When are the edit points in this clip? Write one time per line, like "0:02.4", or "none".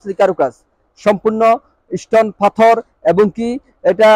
none